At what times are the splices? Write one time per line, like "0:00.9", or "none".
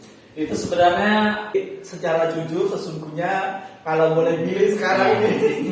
0:01.5